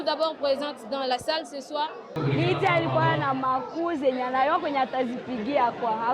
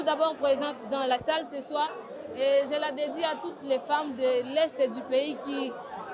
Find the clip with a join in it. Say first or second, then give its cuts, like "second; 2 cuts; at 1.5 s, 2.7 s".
first; 1 cut; at 2.2 s